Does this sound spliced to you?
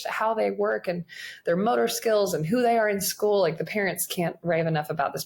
no; 0 cuts

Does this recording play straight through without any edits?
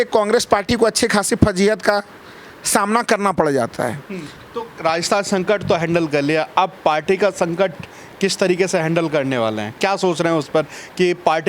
yes; 0 cuts

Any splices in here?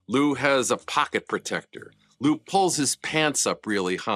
no; 0 cuts

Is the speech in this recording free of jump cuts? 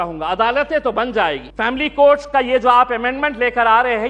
no; 1 cut; at 1.5 s

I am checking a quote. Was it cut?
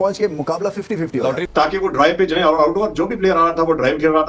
yes; 1 cut; at 1.4 s

